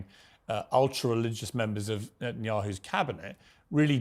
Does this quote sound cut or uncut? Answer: uncut